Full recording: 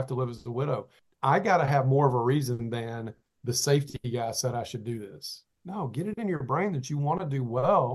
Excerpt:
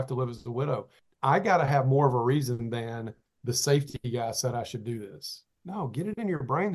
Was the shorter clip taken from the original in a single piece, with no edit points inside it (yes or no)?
yes